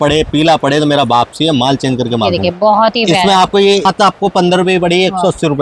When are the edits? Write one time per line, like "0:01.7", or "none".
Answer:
0:03.9